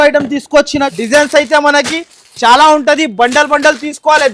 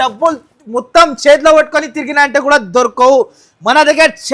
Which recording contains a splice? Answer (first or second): first